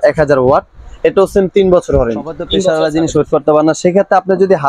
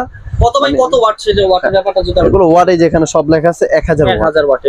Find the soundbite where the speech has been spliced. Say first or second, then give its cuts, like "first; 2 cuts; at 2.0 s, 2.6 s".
first; 1 cut; at 2.7 s